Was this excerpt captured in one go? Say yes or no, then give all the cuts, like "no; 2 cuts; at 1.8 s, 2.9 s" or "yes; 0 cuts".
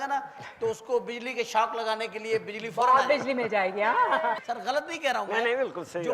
no; 1 cut; at 4.4 s